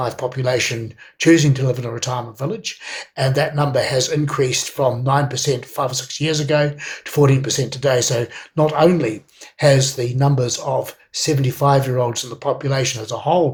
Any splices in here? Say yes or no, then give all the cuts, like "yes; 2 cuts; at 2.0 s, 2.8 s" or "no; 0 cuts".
no; 0 cuts